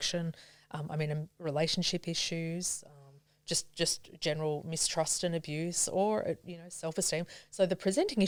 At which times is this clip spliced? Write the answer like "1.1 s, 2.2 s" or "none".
none